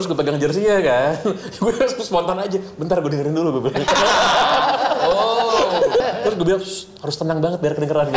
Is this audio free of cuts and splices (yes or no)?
no